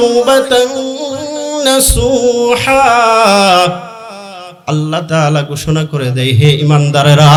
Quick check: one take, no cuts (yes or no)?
yes